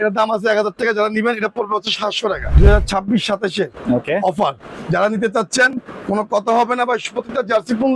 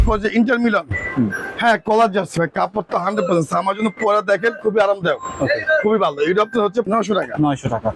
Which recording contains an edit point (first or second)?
first